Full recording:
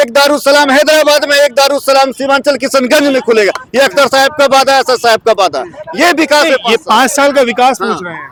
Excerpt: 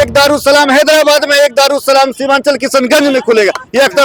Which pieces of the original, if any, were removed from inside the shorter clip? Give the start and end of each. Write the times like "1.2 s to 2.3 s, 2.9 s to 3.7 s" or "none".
none